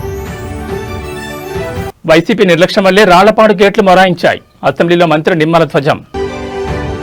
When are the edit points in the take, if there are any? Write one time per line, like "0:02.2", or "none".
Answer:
none